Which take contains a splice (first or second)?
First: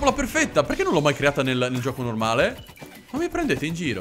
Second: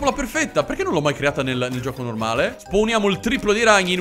second